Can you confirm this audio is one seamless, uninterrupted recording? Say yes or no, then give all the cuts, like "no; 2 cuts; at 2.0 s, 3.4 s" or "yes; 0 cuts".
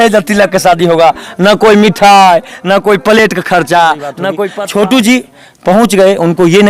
no; 1 cut; at 4.5 s